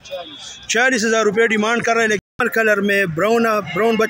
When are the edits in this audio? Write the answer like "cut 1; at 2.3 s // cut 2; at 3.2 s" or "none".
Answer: cut 1; at 2.4 s

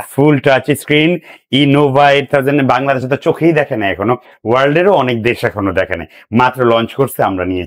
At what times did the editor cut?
none

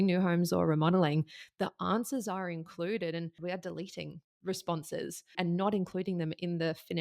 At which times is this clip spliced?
cut 1; at 3.4 s

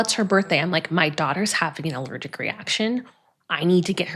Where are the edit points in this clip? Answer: none

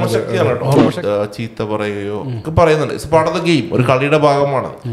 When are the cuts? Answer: cut 1; at 0.9 s

